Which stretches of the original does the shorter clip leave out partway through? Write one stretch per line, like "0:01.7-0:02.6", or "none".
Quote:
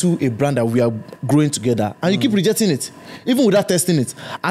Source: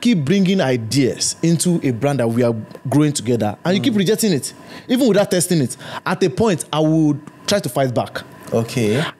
none